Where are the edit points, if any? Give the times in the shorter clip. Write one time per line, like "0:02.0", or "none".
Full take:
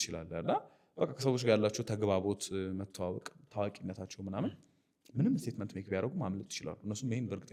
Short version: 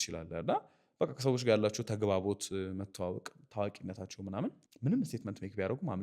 0:04.7